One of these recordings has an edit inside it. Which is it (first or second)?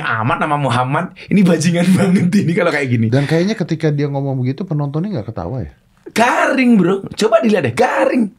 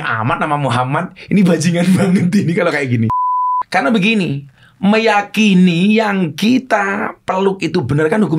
second